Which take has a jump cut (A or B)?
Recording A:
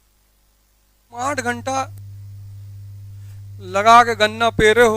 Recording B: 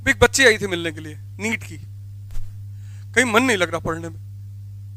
A